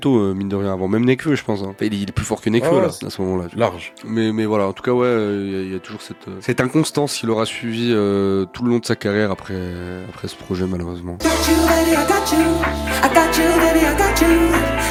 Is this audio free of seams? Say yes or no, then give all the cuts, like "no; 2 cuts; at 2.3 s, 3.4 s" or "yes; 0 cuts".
yes; 0 cuts